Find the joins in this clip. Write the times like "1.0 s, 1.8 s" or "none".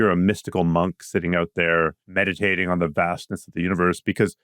2.0 s